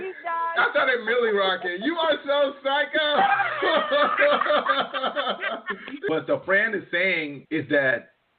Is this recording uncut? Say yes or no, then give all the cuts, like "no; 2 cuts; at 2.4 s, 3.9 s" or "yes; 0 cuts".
no; 2 cuts; at 6.1 s, 7.4 s